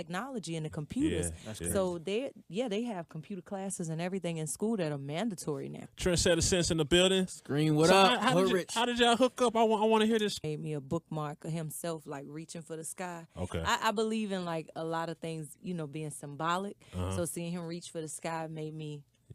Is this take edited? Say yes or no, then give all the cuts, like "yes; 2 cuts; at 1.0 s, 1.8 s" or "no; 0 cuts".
no; 0 cuts